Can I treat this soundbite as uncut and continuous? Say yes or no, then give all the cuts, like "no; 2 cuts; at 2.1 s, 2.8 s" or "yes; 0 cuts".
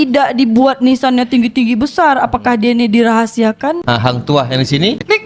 no; 1 cut; at 3.8 s